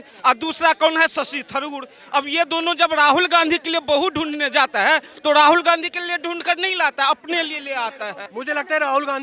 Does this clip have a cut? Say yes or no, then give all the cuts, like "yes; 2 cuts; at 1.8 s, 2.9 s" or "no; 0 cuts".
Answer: yes; 1 cut; at 8.2 s